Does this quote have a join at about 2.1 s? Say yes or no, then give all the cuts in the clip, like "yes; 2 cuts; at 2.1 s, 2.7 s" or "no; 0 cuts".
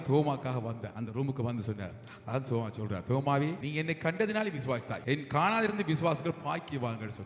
no; 3 cuts; at 0.9 s, 3.6 s, 4.9 s